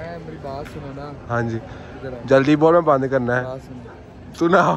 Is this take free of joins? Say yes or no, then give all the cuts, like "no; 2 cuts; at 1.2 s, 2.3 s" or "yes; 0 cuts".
yes; 0 cuts